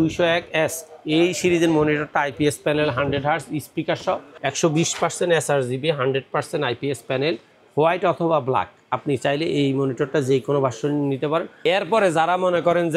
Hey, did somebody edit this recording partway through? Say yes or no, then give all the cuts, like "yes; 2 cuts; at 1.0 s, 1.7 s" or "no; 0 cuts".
yes; 2 cuts; at 4.3 s, 11.5 s